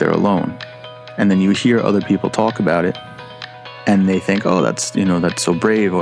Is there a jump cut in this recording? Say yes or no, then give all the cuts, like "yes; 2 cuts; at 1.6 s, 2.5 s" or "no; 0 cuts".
no; 0 cuts